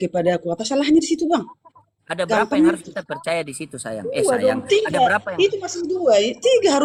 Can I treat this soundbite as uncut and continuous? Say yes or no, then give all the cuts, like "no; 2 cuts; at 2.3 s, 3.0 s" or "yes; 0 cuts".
yes; 0 cuts